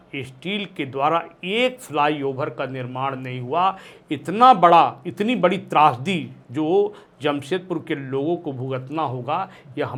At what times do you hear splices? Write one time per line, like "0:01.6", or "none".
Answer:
none